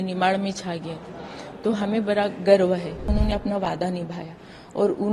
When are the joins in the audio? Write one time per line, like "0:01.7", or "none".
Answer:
0:03.1